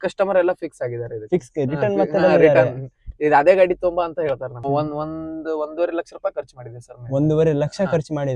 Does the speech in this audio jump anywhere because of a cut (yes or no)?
yes